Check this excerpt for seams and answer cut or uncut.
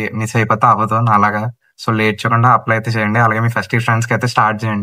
uncut